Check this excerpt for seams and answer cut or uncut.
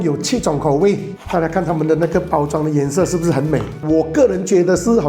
cut